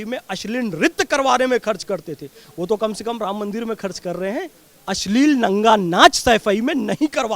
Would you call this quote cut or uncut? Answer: cut